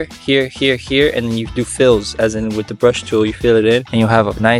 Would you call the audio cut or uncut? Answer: uncut